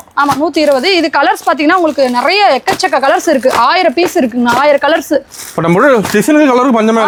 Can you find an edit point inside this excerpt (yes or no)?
no